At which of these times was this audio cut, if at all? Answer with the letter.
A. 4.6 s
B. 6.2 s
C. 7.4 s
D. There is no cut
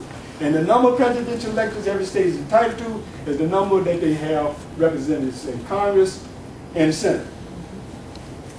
D